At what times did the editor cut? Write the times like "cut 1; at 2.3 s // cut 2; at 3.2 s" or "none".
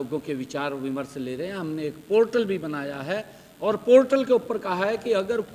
none